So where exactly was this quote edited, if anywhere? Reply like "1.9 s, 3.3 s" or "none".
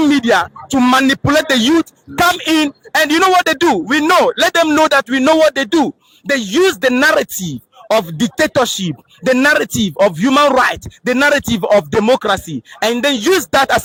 none